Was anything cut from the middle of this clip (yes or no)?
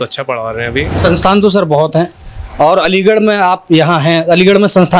yes